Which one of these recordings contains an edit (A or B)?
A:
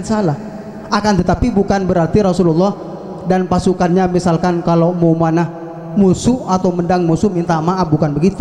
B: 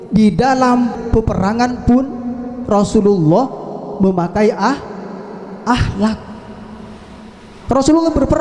B